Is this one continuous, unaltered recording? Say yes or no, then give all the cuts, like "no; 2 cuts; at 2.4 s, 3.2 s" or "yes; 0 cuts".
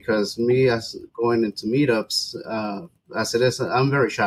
yes; 0 cuts